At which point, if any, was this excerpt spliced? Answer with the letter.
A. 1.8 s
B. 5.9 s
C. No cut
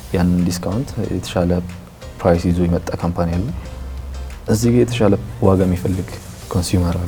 C